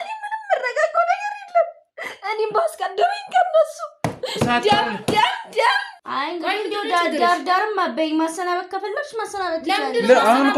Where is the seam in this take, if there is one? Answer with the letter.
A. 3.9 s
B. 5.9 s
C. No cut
B